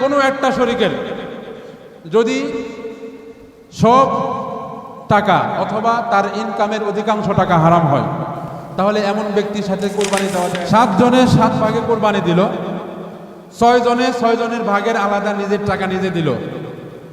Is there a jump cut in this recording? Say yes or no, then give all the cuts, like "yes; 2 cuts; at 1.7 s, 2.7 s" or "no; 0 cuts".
yes; 2 cuts; at 8.4 s, 10.5 s